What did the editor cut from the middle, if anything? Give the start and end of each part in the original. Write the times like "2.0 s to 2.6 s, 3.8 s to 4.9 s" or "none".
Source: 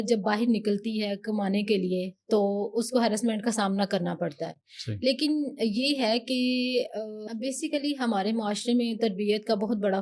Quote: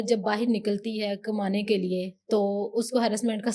none